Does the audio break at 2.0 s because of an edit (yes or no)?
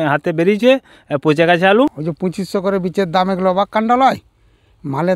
yes